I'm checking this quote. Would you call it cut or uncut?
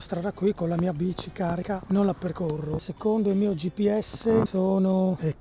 uncut